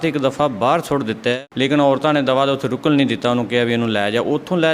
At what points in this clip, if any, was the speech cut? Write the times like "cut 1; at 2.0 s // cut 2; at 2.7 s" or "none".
cut 1; at 1.4 s